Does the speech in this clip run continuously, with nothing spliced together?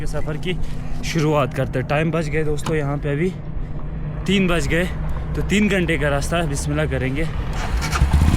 yes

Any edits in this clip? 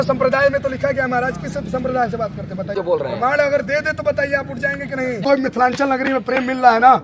yes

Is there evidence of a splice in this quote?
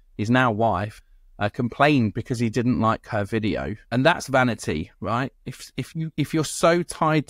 yes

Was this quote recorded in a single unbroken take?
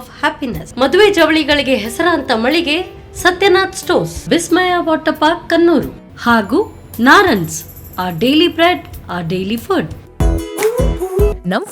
no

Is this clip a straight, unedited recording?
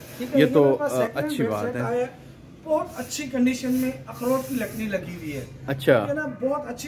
yes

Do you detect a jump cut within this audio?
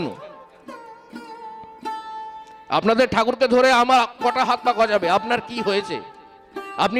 no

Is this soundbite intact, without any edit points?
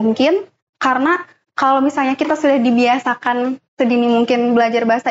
yes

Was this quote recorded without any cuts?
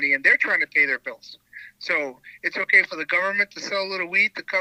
yes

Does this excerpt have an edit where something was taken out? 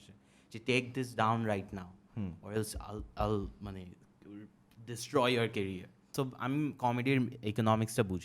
yes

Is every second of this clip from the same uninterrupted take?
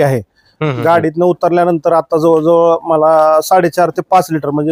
yes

